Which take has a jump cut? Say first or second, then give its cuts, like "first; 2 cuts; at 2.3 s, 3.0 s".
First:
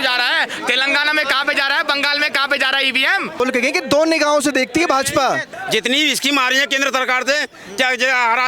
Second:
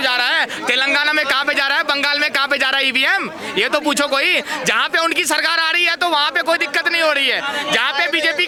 first; 2 cuts; at 3.4 s, 5.5 s